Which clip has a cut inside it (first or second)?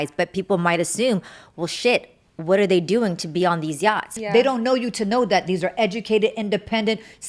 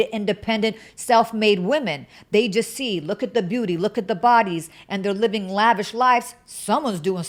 first